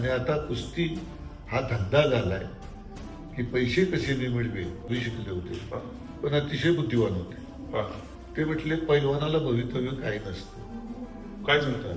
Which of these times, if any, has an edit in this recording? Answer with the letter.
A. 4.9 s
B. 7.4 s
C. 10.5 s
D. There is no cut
A